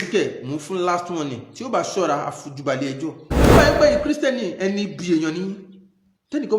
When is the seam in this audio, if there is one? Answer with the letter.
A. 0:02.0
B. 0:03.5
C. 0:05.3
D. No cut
B